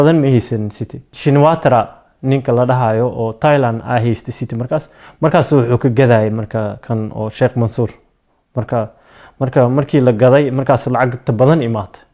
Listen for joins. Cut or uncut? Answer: cut